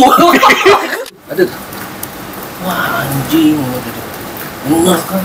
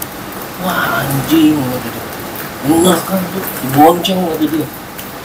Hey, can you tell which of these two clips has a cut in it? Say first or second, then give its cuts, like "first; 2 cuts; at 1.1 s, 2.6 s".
first; 1 cut; at 0.9 s